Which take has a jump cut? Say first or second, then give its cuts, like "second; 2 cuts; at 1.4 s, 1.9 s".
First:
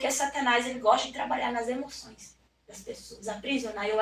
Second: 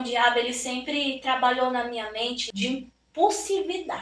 second; 1 cut; at 2.4 s